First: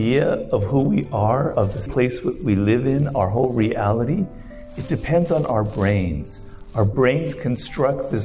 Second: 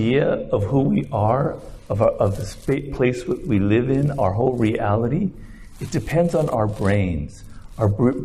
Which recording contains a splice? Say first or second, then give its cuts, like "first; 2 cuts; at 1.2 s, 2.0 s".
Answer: first; 2 cuts; at 1.8 s, 6.9 s